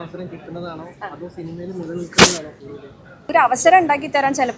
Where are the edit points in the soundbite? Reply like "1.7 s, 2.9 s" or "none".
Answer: 3.3 s